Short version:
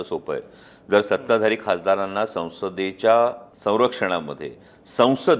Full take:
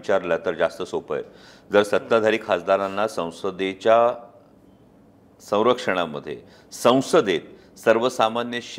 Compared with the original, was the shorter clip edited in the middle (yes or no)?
yes